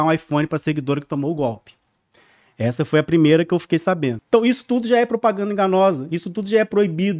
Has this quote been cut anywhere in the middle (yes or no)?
yes